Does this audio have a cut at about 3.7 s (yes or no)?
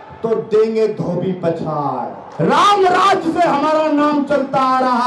no